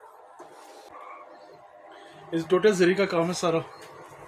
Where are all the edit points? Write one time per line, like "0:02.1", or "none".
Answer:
0:00.9